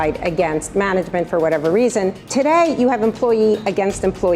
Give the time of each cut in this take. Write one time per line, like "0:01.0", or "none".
0:02.2